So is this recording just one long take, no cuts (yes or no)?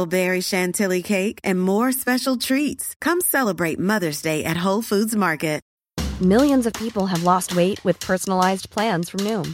no